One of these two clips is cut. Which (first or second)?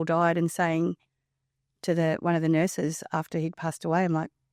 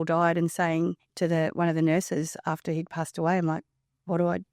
second